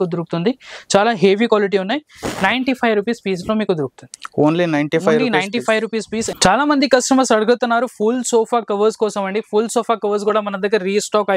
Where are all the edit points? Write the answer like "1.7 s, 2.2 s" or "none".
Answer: 6.2 s

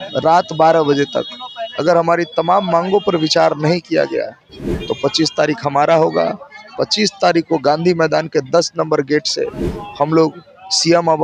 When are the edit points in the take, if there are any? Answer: none

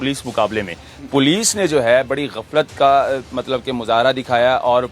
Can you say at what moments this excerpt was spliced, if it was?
0.9 s

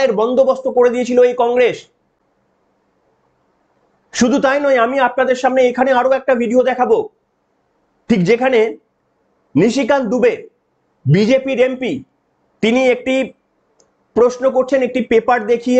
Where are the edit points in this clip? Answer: none

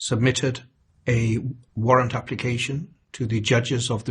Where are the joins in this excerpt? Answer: none

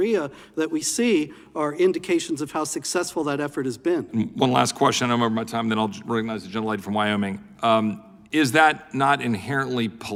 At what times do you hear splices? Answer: none

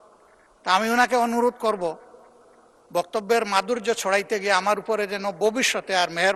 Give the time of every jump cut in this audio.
none

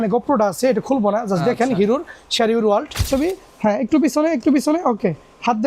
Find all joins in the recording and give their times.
3.1 s

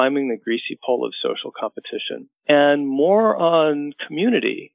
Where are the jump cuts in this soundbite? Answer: 2.2 s

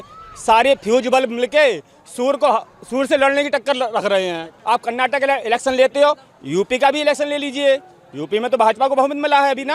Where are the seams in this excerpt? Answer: 4.5 s

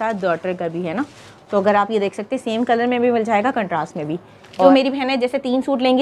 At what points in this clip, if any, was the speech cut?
4.7 s

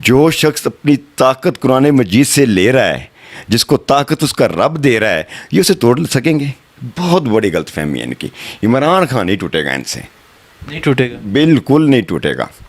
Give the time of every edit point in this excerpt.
none

